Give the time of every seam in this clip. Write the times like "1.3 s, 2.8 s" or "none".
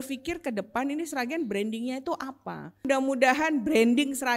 2.9 s